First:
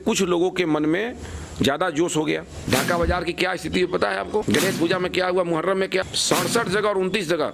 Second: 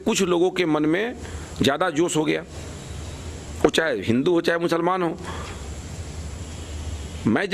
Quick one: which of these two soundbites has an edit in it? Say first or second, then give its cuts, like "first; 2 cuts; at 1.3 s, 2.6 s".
first; 3 cuts; at 2.5 s, 4.4 s, 6.0 s